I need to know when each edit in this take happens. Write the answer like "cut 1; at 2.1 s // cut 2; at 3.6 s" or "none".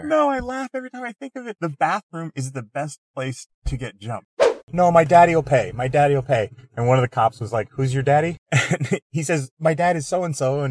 cut 1; at 1.5 s // cut 2; at 4.6 s // cut 3; at 8.4 s